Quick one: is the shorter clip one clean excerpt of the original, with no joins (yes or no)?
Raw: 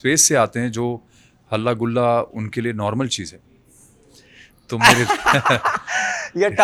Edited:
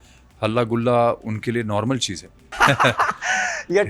no